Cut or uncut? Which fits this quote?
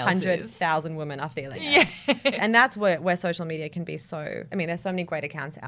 cut